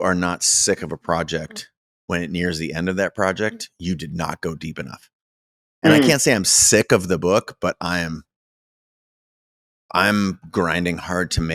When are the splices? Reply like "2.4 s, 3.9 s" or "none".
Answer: none